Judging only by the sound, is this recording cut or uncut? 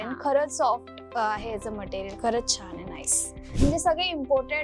cut